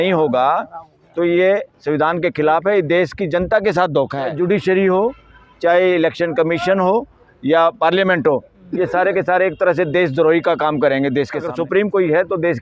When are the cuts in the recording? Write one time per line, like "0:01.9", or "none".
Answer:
0:04.3
0:11.5